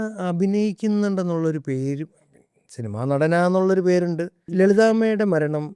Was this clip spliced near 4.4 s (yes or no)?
yes